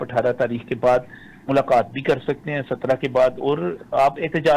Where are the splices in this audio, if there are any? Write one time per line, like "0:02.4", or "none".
none